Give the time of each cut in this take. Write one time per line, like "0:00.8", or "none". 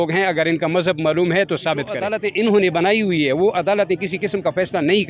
0:02.0